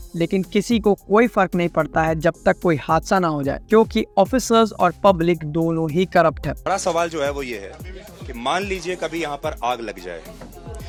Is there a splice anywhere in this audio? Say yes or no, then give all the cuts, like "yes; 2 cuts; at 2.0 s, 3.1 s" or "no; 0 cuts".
no; 0 cuts